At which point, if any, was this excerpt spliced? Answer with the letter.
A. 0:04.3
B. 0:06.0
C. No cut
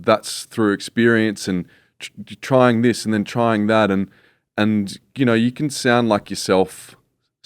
C